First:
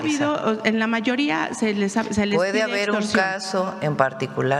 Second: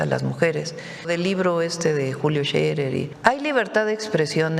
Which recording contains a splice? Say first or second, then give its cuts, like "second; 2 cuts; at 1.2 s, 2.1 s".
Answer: second; 2 cuts; at 1.1 s, 3.1 s